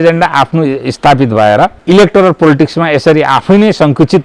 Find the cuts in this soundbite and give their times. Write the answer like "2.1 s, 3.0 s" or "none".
1.8 s